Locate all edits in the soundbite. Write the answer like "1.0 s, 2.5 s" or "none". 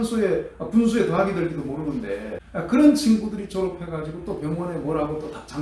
2.4 s